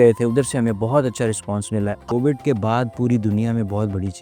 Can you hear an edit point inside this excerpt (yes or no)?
yes